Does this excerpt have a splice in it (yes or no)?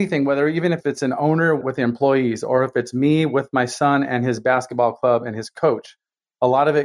yes